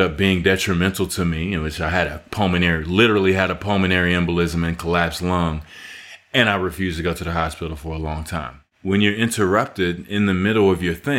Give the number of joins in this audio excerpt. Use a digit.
1